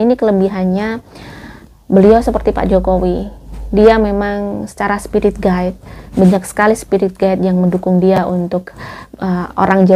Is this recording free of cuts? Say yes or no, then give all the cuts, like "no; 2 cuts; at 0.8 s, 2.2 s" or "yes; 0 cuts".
yes; 0 cuts